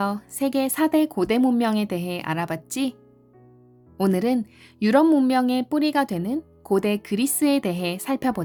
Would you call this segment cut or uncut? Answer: uncut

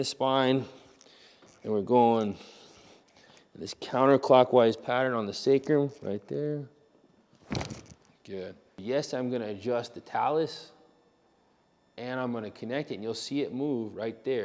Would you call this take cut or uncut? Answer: cut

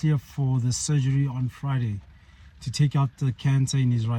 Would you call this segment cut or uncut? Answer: uncut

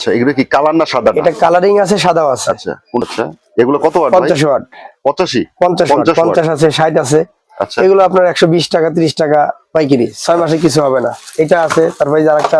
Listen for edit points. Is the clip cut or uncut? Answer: cut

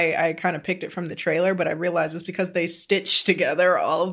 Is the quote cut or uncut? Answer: uncut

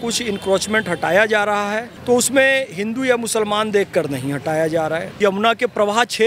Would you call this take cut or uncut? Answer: cut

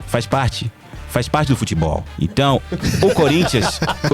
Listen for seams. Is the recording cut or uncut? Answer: cut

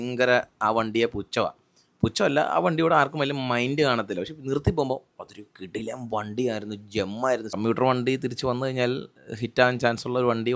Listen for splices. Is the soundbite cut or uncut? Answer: cut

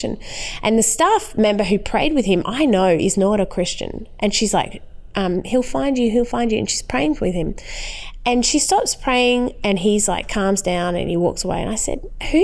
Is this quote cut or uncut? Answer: uncut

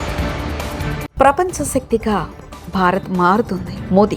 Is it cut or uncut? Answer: cut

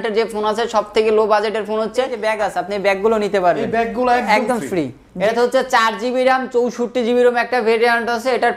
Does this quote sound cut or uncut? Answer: cut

